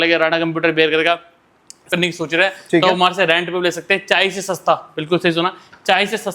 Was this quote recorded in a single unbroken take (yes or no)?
no